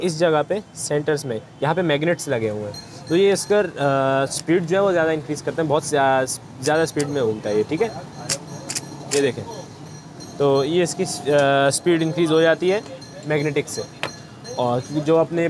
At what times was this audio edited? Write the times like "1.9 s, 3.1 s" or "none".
none